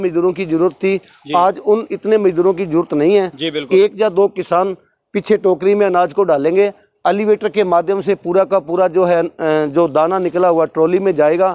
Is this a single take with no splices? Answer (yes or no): yes